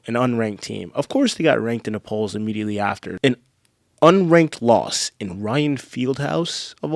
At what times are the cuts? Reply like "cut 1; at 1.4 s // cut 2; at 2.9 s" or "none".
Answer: cut 1; at 3.1 s